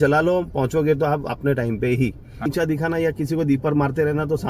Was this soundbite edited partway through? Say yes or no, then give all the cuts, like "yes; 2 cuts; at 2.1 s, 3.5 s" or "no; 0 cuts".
yes; 1 cut; at 2.5 s